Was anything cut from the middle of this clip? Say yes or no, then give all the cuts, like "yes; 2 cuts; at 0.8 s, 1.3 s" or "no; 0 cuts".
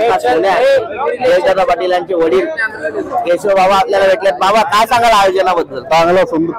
no; 0 cuts